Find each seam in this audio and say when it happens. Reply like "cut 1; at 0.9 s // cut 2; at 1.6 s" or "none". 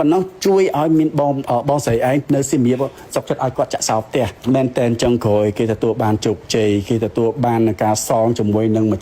cut 1; at 4.3 s